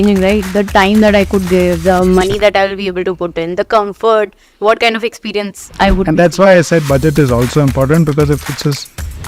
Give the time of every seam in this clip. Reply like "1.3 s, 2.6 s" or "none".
none